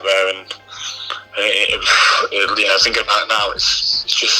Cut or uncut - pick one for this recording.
uncut